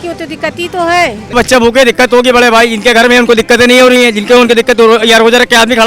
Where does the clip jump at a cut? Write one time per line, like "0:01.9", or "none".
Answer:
0:01.3